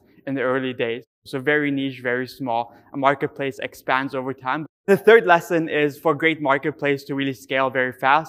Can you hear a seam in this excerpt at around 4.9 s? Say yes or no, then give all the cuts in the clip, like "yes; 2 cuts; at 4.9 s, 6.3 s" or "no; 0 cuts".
yes; 2 cuts; at 1.1 s, 4.9 s